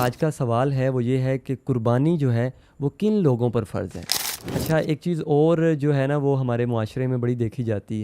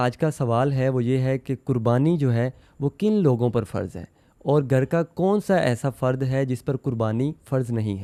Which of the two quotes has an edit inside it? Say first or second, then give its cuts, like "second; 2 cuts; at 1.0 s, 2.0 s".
first; 1 cut; at 4.3 s